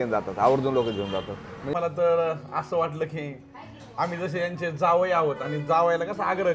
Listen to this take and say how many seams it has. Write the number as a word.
one